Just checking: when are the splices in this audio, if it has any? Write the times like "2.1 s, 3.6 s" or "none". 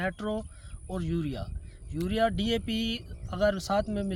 none